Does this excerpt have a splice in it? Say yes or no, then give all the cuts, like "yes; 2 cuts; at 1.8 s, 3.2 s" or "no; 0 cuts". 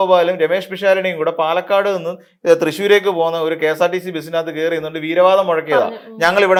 no; 0 cuts